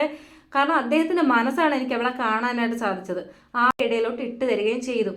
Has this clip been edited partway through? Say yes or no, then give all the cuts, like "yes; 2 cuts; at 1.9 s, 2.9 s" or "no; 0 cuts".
yes; 1 cut; at 3.7 s